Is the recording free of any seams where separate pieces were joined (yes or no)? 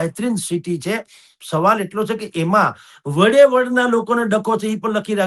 yes